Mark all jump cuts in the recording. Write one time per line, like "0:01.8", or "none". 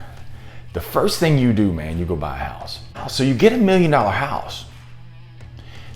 0:03.0